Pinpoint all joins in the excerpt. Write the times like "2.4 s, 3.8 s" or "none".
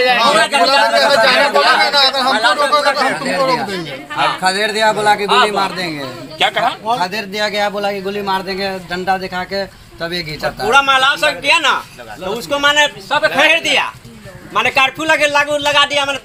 none

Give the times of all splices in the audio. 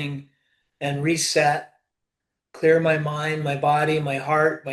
none

